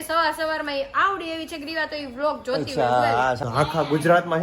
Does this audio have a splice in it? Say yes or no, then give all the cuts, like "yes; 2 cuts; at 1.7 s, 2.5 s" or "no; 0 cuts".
yes; 1 cut; at 3.4 s